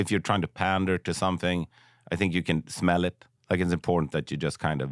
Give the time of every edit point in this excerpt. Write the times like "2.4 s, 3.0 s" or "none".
3.3 s

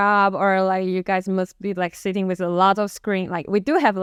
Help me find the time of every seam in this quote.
none

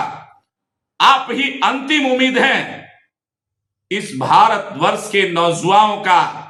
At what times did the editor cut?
none

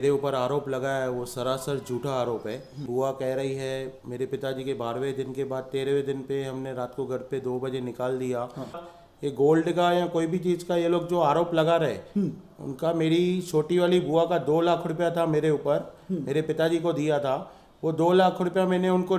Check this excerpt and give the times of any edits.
2.9 s, 8.9 s

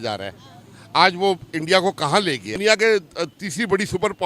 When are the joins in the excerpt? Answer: 2.6 s

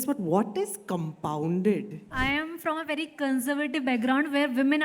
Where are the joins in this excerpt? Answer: 2.1 s

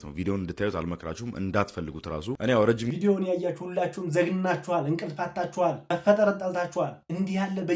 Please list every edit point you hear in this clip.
2.9 s

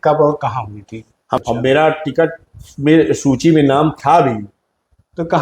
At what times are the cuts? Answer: 1.2 s

